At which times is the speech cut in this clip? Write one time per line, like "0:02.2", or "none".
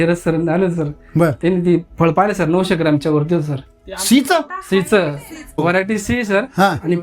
none

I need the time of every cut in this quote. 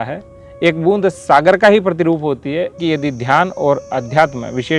0:02.8

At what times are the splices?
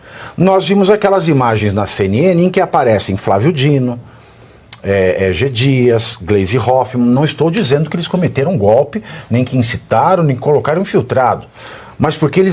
none

